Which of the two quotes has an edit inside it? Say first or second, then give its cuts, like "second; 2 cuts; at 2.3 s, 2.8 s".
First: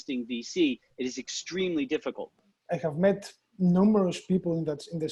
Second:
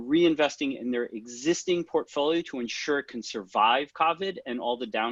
first; 1 cut; at 2.4 s